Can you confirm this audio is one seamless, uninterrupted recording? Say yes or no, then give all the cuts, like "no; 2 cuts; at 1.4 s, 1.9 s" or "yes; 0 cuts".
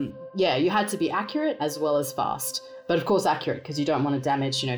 no; 1 cut; at 1.6 s